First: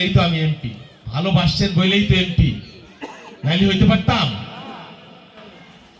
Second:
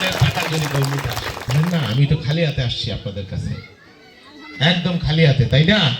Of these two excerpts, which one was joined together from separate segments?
second; 1 cut; at 1.4 s

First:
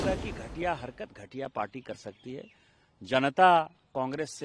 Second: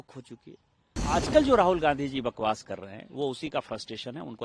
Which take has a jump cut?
second; 1 cut; at 1.0 s

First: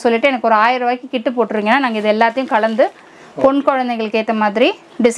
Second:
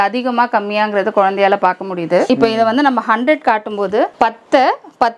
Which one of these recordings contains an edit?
second; 2 cuts; at 2.3 s, 4.1 s

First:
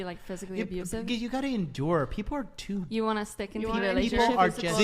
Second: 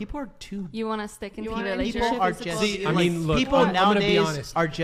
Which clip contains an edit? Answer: first; 1 cut; at 1.1 s

